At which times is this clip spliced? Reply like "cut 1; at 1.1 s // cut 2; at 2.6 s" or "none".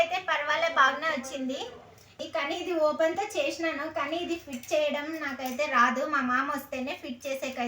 cut 1; at 2.2 s